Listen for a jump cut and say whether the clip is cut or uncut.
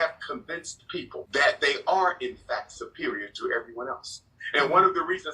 cut